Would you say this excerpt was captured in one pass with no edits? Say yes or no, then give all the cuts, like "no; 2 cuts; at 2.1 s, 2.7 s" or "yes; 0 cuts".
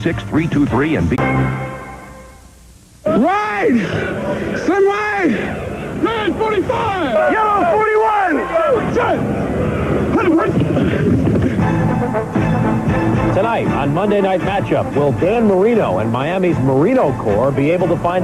yes; 0 cuts